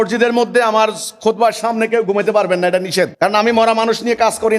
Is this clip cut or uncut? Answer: cut